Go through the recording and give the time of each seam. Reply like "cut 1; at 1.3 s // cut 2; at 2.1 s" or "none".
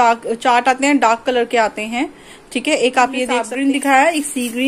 cut 1; at 3.5 s